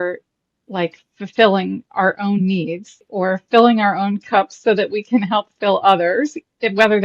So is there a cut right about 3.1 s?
yes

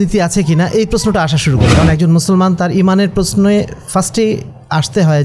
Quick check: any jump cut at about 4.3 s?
no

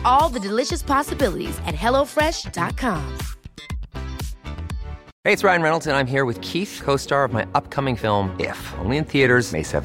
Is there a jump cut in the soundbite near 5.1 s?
yes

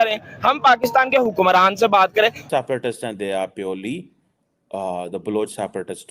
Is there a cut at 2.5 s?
yes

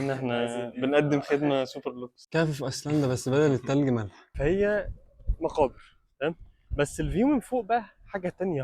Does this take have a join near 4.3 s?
yes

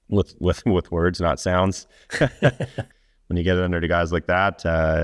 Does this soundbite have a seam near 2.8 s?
yes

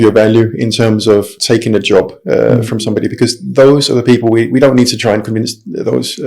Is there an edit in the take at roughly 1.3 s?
yes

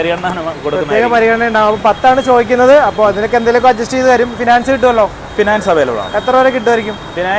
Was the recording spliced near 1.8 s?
no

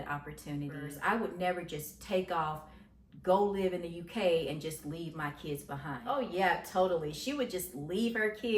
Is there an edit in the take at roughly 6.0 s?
yes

